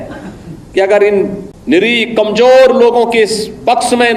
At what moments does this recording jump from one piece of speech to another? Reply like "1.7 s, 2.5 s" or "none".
1.5 s

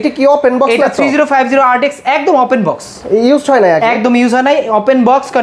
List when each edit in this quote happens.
none

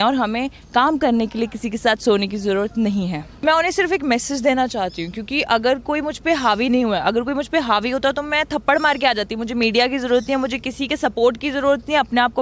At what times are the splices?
3.3 s

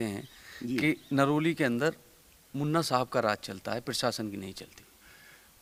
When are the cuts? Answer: none

